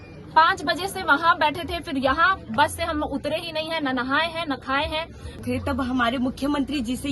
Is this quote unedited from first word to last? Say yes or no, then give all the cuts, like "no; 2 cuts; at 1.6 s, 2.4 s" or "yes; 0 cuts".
no; 1 cut; at 5.3 s